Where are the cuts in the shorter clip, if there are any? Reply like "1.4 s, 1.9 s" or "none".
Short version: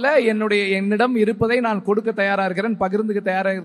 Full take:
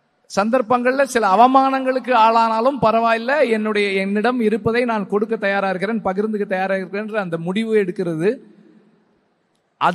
none